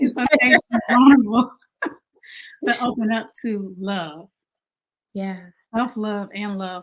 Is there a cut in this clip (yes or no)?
no